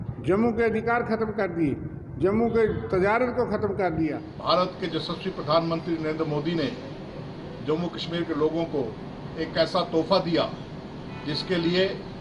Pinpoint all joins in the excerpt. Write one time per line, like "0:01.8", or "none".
0:04.3